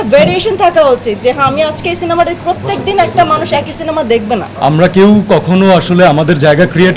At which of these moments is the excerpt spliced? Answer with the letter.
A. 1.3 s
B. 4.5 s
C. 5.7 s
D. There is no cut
B